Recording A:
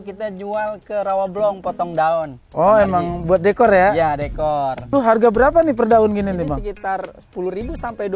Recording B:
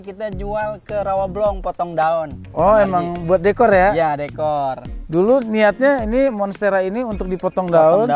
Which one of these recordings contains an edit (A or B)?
A